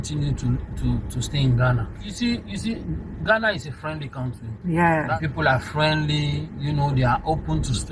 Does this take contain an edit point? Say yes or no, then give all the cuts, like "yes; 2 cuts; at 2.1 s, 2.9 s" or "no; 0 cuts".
yes; 2 cuts; at 2.1 s, 5.1 s